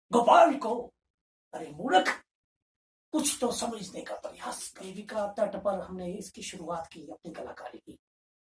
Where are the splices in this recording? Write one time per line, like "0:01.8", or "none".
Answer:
0:04.7

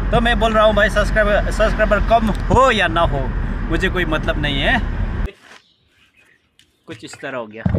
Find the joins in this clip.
0:05.3

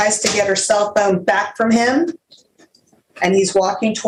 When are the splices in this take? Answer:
none

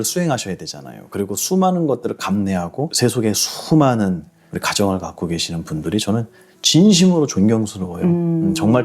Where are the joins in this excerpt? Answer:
0:02.9

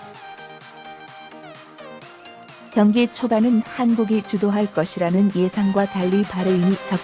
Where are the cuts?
0:02.7

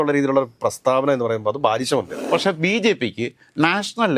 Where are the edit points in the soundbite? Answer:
0:02.2

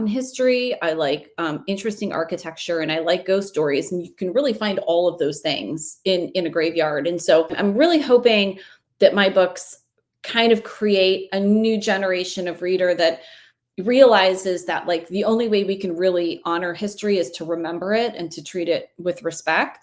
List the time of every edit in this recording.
0:07.5

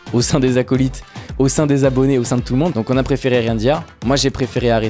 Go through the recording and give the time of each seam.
0:02.7

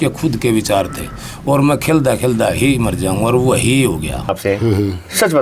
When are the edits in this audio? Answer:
0:04.3

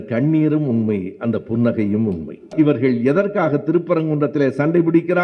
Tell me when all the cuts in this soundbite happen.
0:02.5

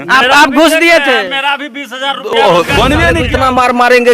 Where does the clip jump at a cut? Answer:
0:03.2

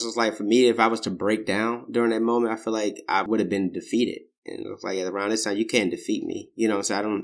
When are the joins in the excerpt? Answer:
0:03.2

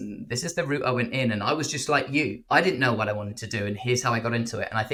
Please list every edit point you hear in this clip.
none

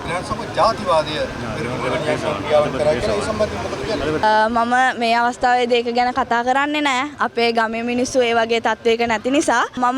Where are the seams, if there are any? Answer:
none

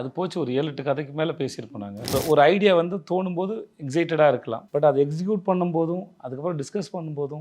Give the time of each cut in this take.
0:02.1
0:04.6

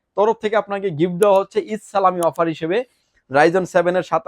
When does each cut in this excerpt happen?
0:03.0

